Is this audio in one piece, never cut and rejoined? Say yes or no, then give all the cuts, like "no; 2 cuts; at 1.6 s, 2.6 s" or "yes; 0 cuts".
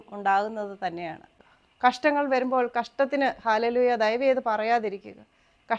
no; 1 cut; at 1.3 s